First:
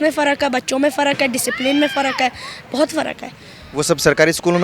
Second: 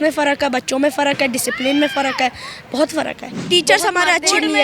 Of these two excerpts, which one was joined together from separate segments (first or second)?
second